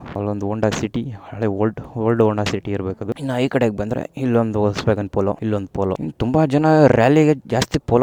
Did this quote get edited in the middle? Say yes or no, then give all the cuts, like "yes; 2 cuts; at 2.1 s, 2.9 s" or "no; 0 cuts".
no; 0 cuts